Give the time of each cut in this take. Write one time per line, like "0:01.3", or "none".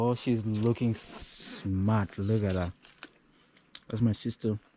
none